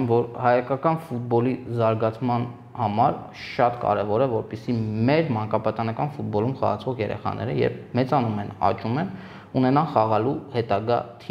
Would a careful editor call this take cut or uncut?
uncut